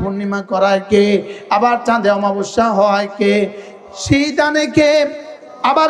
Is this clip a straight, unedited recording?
yes; 0 cuts

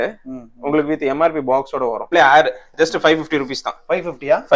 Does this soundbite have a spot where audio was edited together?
yes; 1 cut; at 2.1 s

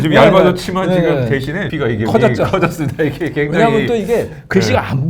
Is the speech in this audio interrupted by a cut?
yes; 1 cut; at 1.7 s

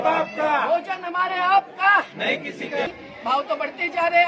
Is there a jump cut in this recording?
yes; 1 cut; at 2.9 s

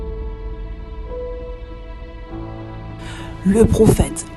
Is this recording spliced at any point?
yes; 1 cut; at 3.4 s

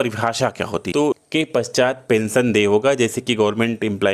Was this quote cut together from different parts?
yes; 1 cut; at 1.2 s

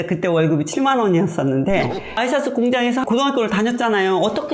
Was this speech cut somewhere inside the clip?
yes; 2 cuts; at 2.1 s, 3.0 s

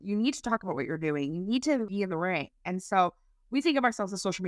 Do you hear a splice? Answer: yes; 1 cut; at 1.9 s

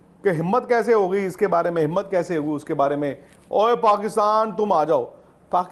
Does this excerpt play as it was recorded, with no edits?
yes; 0 cuts

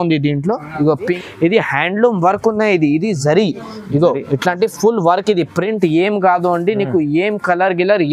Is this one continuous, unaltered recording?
no; 1 cut; at 1.2 s

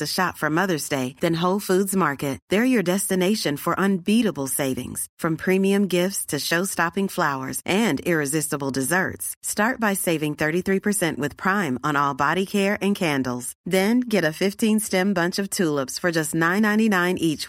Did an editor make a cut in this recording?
no; 0 cuts

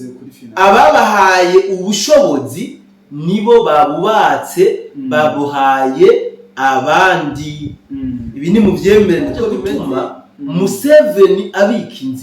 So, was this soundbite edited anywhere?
yes; 1 cut; at 9.7 s

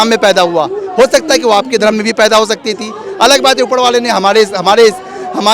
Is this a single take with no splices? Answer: yes; 0 cuts

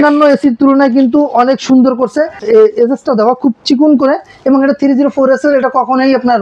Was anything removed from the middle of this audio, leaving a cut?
yes; 1 cut; at 2.4 s

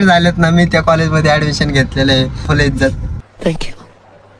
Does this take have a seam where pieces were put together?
yes; 1 cut; at 2.5 s

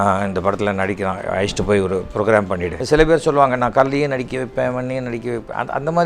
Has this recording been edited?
yes; 1 cut; at 2.7 s

